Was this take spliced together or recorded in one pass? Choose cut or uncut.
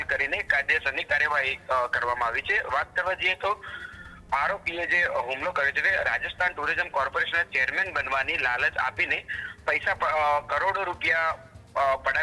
uncut